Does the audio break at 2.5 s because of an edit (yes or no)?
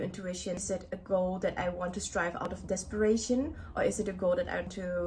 yes